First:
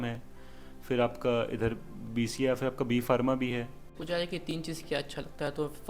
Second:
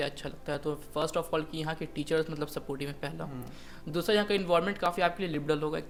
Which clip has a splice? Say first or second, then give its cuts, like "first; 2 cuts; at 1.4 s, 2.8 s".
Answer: first; 1 cut; at 3.9 s